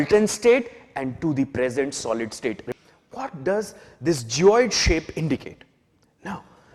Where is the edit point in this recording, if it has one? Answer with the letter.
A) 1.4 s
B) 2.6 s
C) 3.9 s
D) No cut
B